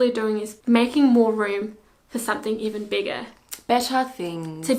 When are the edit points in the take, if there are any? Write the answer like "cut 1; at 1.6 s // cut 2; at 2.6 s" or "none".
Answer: none

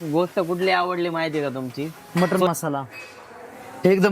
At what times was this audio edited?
cut 1; at 1.9 s

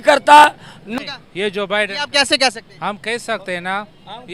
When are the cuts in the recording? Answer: cut 1; at 1.0 s

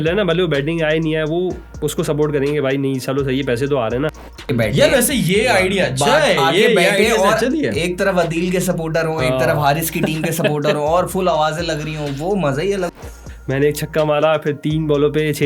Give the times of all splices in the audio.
cut 1; at 4.4 s // cut 2; at 13.0 s

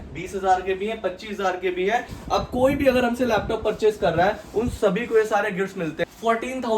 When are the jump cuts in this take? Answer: cut 1; at 2.1 s // cut 2; at 6.0 s

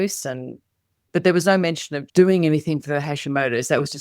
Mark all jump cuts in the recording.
cut 1; at 1.0 s

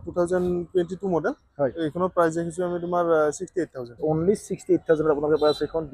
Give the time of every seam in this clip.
cut 1; at 3.9 s

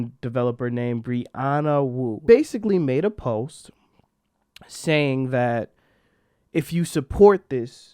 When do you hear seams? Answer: cut 1; at 2.2 s

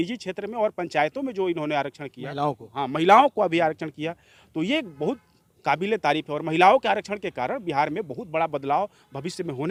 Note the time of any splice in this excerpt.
none

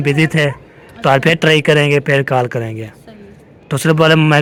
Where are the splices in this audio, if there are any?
none

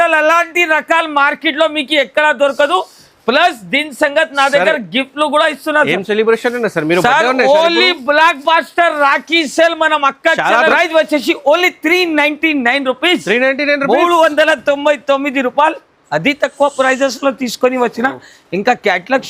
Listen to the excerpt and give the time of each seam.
cut 1; at 10.7 s

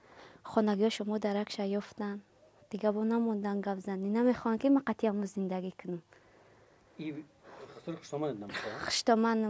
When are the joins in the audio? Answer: cut 1; at 2.0 s

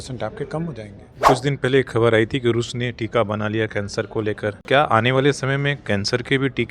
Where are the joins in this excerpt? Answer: cut 1; at 1.3 s // cut 2; at 4.6 s

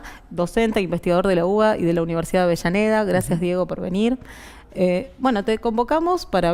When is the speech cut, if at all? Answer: none

